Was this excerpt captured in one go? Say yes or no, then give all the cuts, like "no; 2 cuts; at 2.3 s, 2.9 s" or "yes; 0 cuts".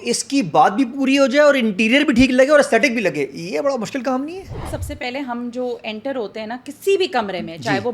no; 1 cut; at 4.8 s